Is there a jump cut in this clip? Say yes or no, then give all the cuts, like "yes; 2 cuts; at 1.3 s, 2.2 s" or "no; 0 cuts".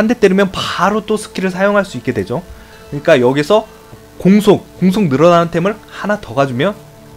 yes; 1 cut; at 4.0 s